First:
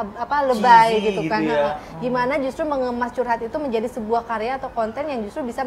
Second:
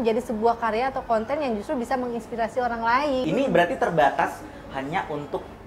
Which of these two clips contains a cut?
second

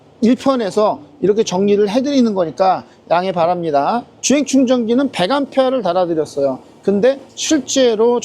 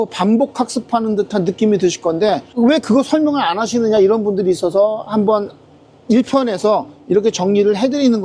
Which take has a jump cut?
first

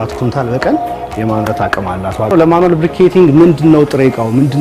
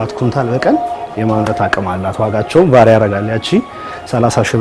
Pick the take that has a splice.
first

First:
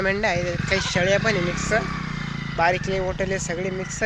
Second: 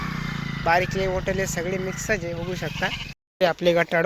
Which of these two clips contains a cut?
second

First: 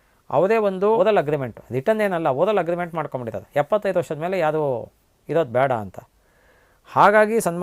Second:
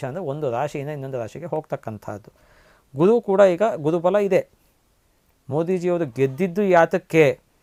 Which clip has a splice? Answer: first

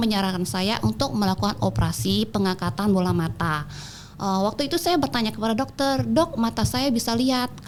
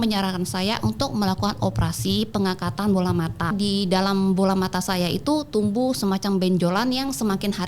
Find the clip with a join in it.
second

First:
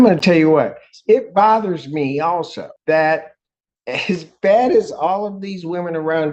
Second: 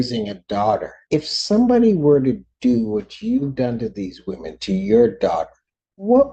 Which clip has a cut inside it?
second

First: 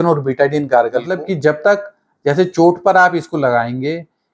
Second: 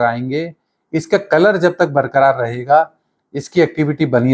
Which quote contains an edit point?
first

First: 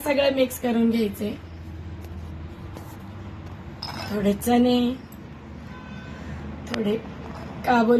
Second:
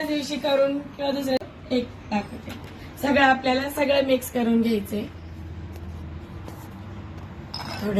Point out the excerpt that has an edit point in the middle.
second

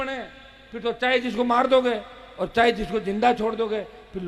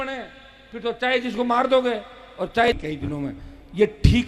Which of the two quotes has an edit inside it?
second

